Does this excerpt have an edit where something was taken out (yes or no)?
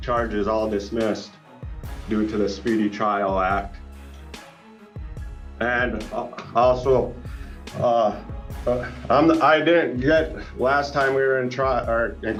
no